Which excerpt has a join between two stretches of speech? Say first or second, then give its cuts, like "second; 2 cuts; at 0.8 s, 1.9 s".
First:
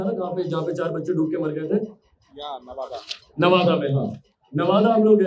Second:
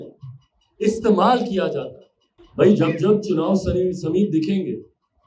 second; 1 cut; at 2.5 s